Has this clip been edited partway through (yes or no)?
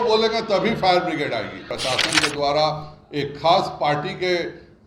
yes